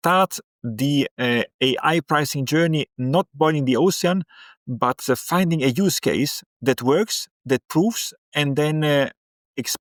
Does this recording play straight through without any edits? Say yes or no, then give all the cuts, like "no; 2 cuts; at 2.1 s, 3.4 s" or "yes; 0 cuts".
yes; 0 cuts